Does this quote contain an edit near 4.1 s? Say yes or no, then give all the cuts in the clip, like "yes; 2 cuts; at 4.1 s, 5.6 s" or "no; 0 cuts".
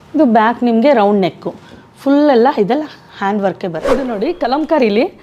yes; 1 cut; at 4.1 s